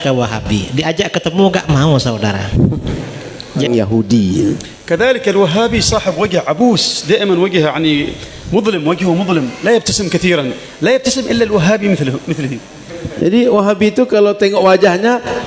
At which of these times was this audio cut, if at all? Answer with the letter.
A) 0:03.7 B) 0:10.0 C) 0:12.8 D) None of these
A